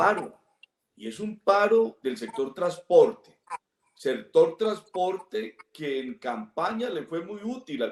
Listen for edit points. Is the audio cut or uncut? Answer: uncut